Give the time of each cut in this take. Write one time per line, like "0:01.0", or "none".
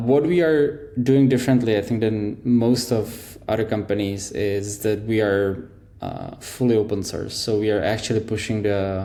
none